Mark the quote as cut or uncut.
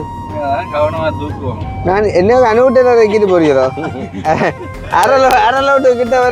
uncut